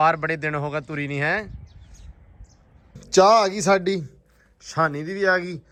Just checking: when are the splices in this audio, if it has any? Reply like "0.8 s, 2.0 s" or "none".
none